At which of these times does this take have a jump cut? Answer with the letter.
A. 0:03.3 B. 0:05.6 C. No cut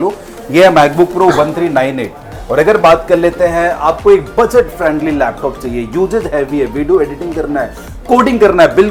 C